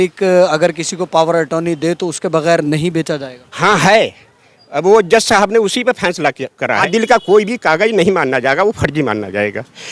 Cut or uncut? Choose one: cut